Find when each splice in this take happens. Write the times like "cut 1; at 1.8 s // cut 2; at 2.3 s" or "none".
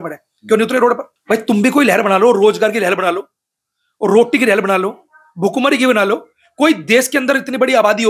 cut 1; at 1.1 s